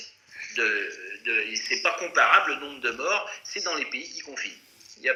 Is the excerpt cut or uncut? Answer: uncut